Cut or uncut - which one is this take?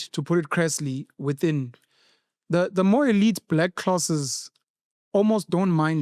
uncut